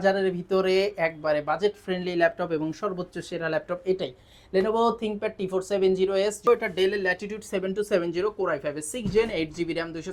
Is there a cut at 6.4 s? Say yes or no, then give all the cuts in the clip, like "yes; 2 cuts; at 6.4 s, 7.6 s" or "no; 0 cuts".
yes; 1 cut; at 6.4 s